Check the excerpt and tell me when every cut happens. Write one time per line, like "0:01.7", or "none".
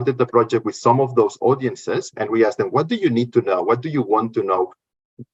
none